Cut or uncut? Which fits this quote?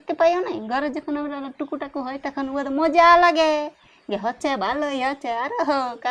uncut